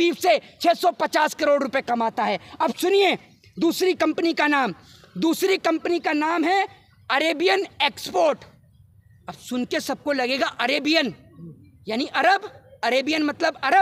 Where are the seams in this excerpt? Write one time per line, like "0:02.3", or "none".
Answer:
none